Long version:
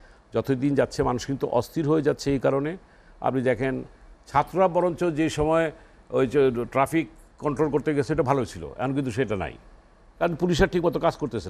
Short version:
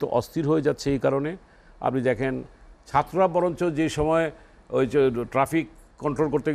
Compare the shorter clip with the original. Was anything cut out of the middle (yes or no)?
no